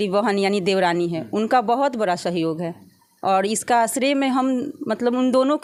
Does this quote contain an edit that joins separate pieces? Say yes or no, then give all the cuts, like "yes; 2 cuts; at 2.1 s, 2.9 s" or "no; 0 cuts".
no; 0 cuts